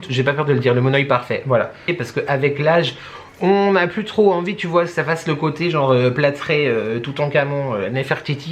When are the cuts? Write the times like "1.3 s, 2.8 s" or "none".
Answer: 1.8 s